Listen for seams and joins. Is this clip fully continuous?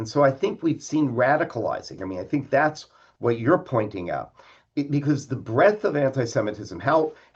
yes; 0 cuts

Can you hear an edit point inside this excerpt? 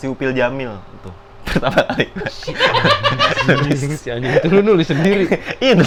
no; 0 cuts

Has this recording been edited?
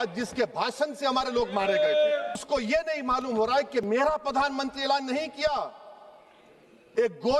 yes; 1 cut; at 2.4 s

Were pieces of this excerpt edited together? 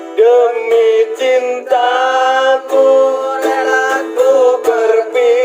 no; 0 cuts

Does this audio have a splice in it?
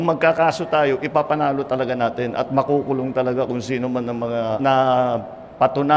yes; 1 cut; at 4.6 s

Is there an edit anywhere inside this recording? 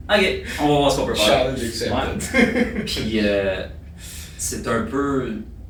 no; 0 cuts

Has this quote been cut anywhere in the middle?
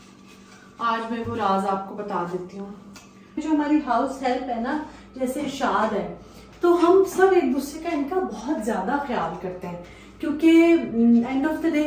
yes; 1 cut; at 3.4 s

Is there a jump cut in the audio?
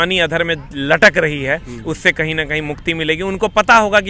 no; 0 cuts

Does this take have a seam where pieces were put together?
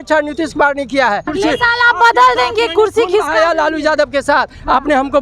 yes; 1 cut; at 1.3 s

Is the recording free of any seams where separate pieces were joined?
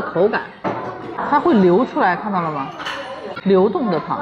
no; 2 cuts; at 1.2 s, 3.3 s

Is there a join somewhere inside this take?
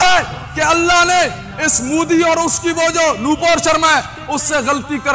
no; 0 cuts

